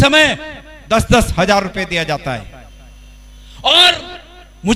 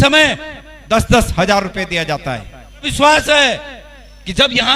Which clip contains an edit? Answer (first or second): second